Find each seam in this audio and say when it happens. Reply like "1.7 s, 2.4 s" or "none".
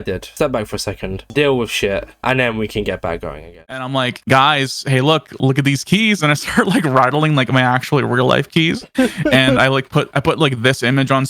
3.8 s